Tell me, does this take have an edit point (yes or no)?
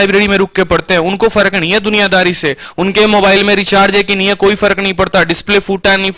no